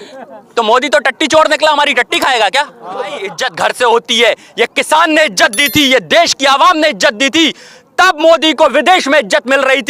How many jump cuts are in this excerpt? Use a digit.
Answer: 1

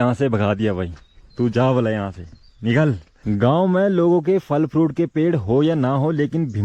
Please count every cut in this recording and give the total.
1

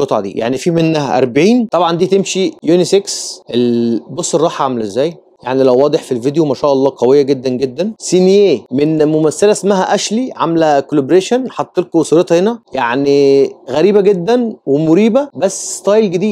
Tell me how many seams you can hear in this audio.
2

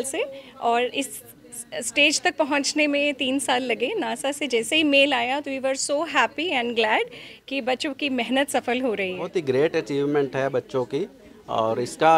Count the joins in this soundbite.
1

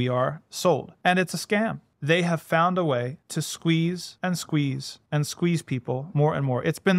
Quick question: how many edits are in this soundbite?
5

